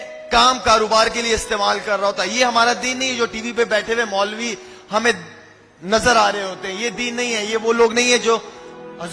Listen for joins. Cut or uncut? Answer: uncut